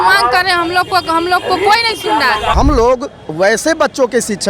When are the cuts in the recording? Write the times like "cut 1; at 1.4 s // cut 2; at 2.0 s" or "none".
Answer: cut 1; at 2.5 s